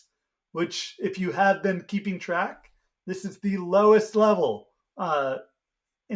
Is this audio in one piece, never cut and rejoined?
yes; 0 cuts

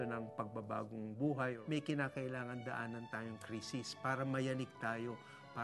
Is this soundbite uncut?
no; 1 cut; at 1.6 s

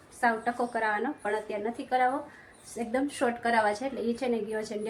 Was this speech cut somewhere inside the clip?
no; 0 cuts

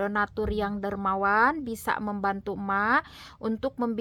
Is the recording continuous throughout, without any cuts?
yes; 0 cuts

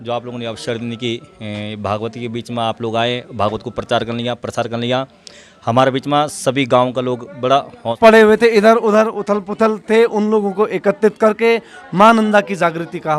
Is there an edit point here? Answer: yes; 1 cut; at 7.8 s

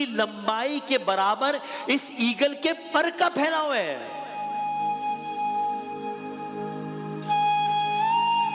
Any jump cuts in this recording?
no; 0 cuts

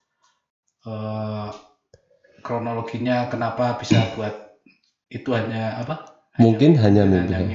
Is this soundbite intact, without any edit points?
yes; 0 cuts

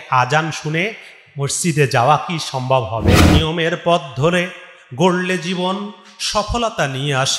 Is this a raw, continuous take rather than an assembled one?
no; 1 cut; at 3.2 s

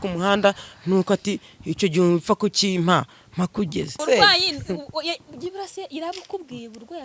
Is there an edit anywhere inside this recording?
yes; 1 cut; at 4.0 s

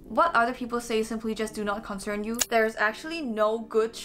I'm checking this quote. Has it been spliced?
yes; 1 cut; at 2.4 s

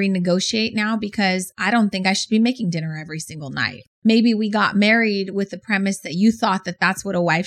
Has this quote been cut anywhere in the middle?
yes; 1 cut; at 3.9 s

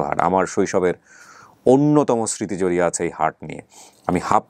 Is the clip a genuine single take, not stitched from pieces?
yes; 0 cuts

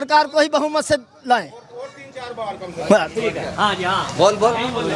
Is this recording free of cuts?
yes; 0 cuts

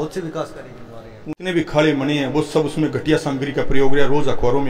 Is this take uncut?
no; 1 cut; at 1.3 s

